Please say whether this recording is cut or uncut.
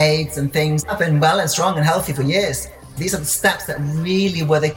cut